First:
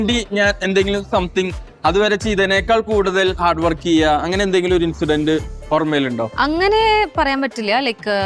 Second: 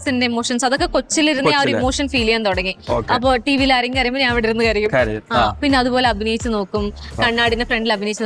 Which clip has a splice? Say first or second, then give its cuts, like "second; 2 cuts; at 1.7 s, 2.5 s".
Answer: first; 1 cut; at 6.3 s